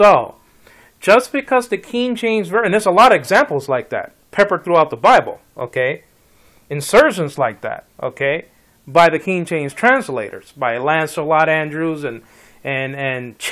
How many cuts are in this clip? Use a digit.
1